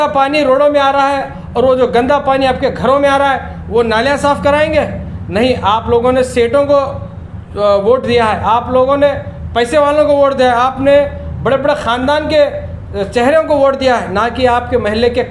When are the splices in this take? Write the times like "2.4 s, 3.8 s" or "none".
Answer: none